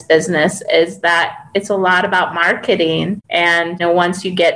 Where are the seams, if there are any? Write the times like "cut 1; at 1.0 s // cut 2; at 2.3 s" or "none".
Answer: cut 1; at 3.2 s